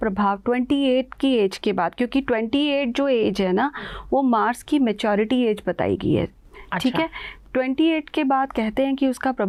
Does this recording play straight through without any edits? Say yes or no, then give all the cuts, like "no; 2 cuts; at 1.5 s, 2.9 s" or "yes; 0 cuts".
yes; 0 cuts